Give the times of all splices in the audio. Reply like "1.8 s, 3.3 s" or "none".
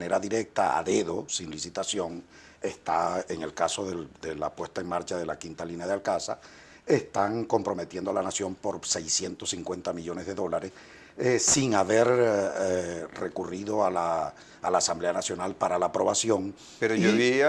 15.9 s